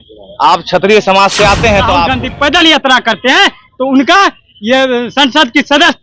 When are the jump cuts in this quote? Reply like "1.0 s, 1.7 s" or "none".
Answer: 2.1 s